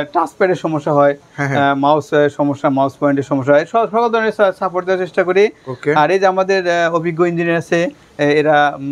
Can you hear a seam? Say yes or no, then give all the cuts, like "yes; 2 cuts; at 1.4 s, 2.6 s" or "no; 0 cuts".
no; 0 cuts